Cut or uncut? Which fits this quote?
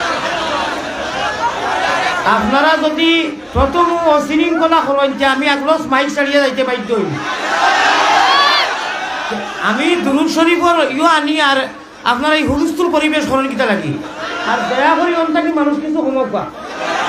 uncut